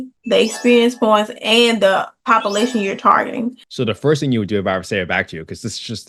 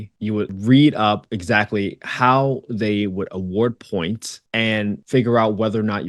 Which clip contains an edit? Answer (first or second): first